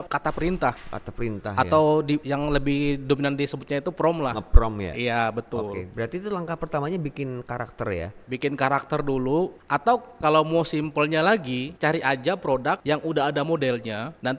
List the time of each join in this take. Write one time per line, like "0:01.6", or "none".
none